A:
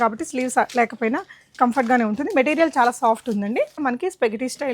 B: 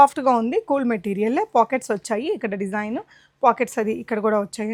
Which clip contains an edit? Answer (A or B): A